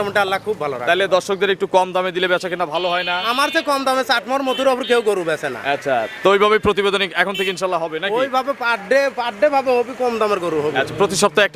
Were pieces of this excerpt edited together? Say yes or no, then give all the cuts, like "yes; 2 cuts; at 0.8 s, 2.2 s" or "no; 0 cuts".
no; 0 cuts